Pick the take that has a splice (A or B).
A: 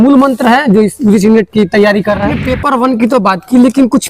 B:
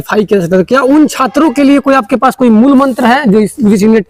A